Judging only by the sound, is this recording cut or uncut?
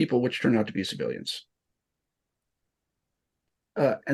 uncut